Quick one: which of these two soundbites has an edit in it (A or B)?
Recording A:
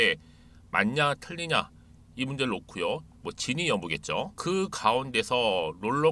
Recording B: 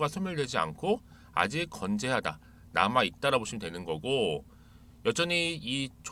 A